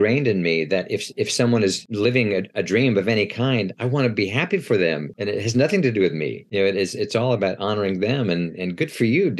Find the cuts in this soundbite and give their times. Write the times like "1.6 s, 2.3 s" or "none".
1.8 s, 5.1 s, 6.4 s